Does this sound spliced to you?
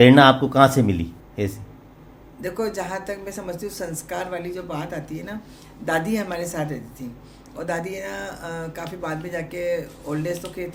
no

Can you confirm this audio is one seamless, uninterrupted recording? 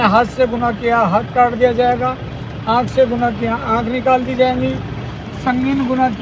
yes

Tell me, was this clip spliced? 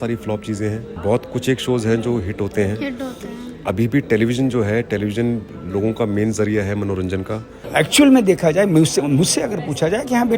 yes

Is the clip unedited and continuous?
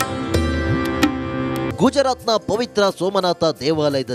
no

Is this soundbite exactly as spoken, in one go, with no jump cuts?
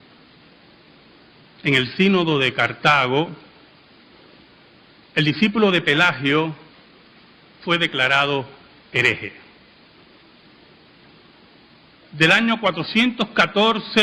yes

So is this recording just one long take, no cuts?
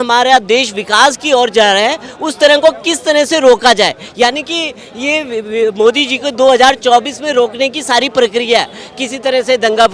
yes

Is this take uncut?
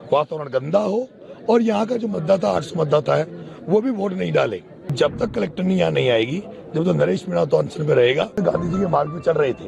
no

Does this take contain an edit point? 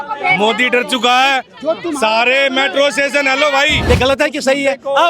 yes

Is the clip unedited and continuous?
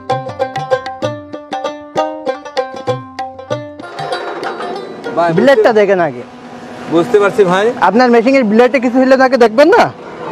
no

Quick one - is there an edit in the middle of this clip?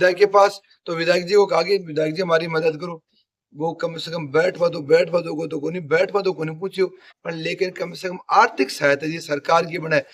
no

